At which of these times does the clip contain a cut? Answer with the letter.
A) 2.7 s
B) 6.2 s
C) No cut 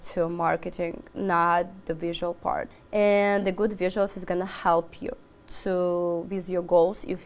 A